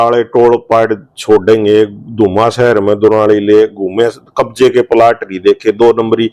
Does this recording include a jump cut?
no; 0 cuts

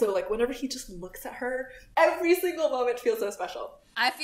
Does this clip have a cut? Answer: yes; 2 cuts; at 1.9 s, 3.3 s

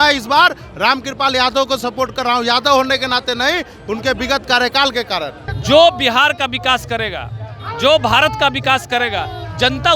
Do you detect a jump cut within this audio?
no; 0 cuts

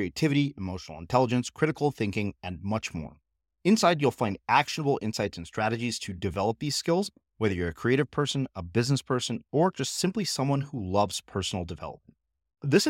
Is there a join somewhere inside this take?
no; 0 cuts

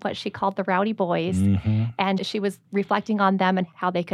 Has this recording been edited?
no; 0 cuts

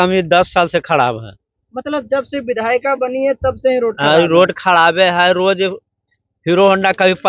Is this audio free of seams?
yes; 0 cuts

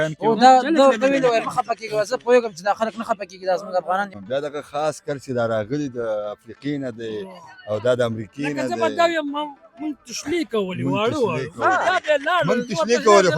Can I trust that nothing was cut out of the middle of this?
no; 1 cut; at 4.1 s

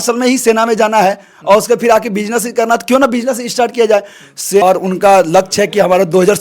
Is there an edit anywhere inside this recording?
yes; 1 cut; at 4.6 s

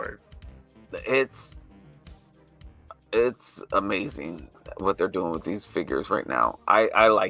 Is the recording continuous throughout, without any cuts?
no; 2 cuts; at 1.3 s, 2.8 s

